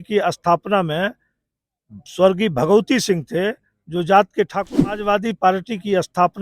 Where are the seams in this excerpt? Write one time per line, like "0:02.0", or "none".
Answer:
0:05.0